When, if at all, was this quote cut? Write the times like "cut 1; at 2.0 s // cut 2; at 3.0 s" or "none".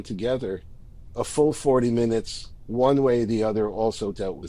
none